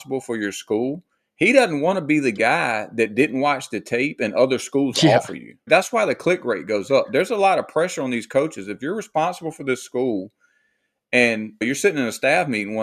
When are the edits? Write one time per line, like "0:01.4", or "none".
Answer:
0:05.7
0:11.6